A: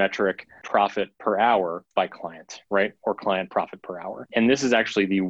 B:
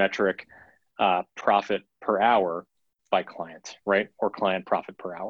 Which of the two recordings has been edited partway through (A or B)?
A